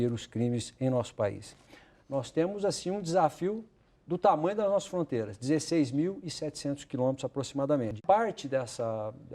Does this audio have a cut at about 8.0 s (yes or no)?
yes